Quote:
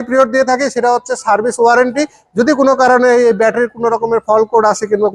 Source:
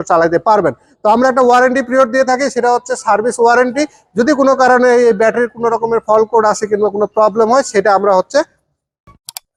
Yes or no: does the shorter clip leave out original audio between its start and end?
no